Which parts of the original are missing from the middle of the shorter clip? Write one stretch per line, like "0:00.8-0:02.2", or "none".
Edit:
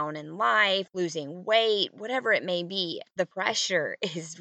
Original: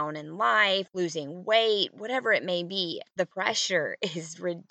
none